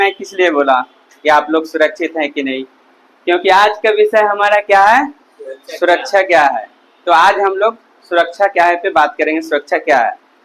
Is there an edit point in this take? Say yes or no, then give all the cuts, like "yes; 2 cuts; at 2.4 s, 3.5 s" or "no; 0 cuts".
no; 0 cuts